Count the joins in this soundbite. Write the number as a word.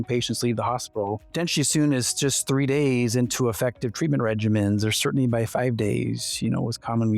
one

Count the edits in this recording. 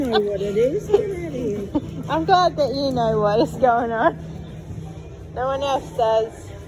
zero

